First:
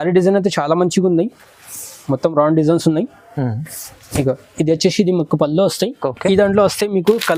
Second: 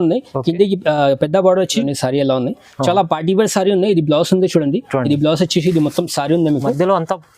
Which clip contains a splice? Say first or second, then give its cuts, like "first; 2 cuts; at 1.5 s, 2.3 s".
second; 1 cut; at 1.9 s